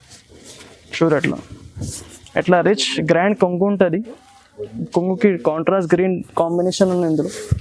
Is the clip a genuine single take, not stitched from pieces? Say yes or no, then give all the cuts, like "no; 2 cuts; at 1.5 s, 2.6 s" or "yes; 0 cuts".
yes; 0 cuts